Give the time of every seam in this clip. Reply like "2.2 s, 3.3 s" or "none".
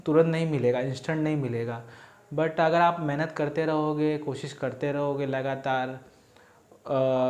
none